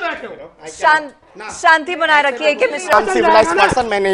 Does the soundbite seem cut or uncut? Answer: cut